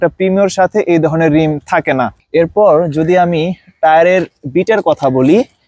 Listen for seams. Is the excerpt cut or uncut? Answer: uncut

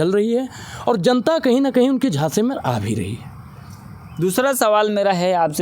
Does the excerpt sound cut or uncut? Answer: uncut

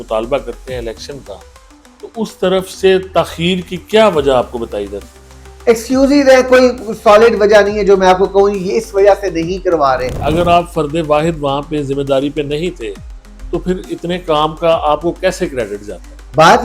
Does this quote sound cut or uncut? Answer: cut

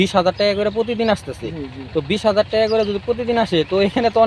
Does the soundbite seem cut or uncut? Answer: uncut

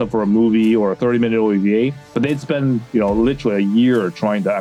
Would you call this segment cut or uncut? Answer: uncut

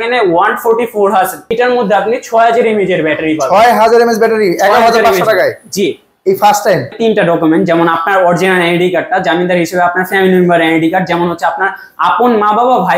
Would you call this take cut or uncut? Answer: cut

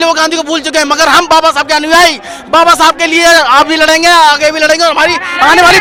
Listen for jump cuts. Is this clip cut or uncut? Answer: uncut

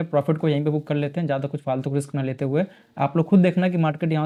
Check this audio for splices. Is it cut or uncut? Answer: uncut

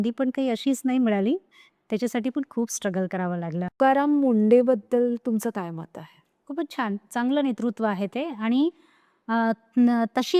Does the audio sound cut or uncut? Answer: cut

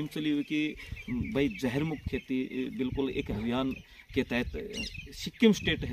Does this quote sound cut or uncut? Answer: uncut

